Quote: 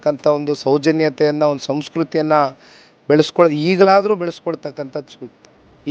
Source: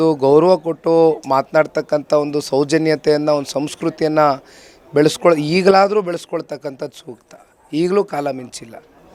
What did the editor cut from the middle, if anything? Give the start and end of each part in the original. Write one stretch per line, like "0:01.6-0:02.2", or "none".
none